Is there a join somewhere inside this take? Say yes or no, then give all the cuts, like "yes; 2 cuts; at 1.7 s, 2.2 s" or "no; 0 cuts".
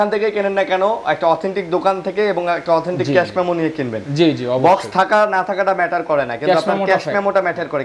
no; 0 cuts